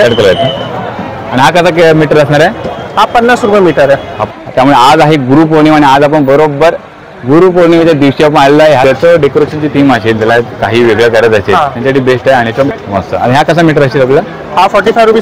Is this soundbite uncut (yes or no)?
no